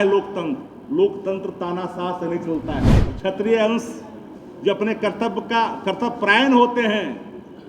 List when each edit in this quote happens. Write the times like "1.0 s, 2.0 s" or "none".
2.9 s

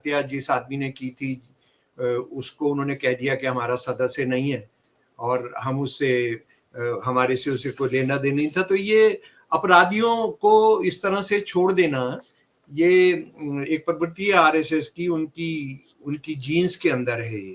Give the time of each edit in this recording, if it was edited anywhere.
none

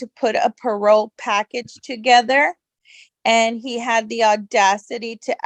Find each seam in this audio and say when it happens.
none

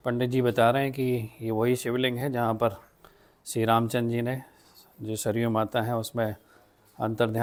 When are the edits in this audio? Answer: none

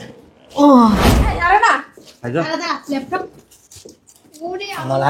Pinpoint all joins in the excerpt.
1.2 s

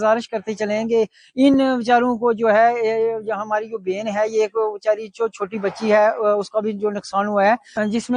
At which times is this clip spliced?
none

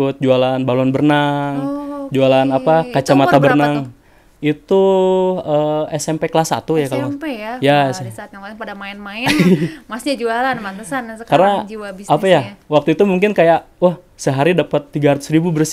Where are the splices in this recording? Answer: none

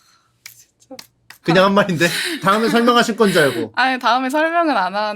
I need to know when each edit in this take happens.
1.3 s, 2.4 s

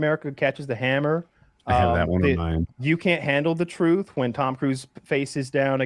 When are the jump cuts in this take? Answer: none

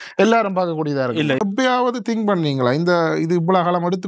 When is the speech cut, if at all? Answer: 1.4 s

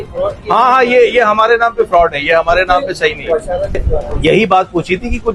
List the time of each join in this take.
3.8 s

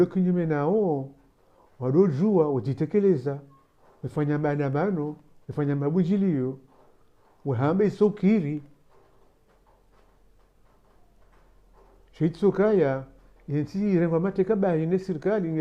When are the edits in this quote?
5.6 s

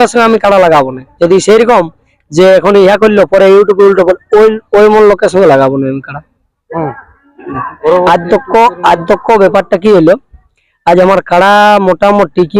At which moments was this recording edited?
none

